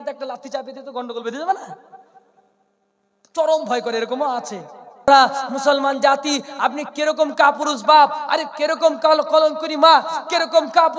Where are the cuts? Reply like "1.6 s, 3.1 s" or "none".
5.1 s